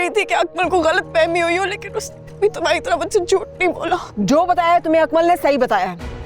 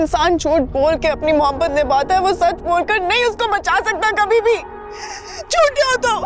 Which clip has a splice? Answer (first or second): first